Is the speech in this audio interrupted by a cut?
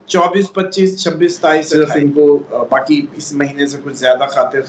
yes; 1 cut; at 1.7 s

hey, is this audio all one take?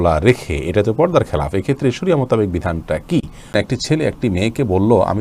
no; 1 cut; at 3.5 s

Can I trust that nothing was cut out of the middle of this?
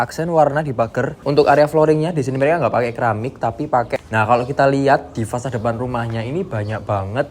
no; 2 cuts; at 1.2 s, 4.0 s

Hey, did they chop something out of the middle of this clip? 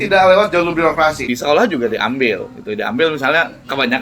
yes; 1 cut; at 1.2 s

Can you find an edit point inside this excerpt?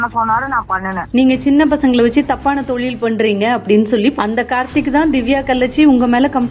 yes; 2 cuts; at 1.0 s, 4.1 s

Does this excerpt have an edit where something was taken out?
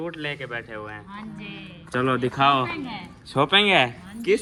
no; 0 cuts

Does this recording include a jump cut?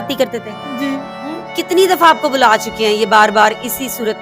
yes; 1 cut; at 1.4 s

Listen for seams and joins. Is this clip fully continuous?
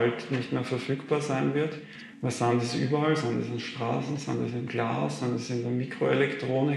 no; 2 cuts; at 1.9 s, 5.7 s

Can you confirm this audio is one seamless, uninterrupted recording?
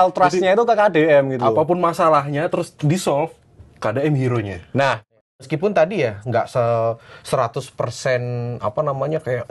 no; 1 cut; at 5.2 s

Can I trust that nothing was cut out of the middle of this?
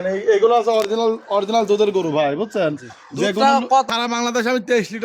no; 1 cut; at 3.9 s

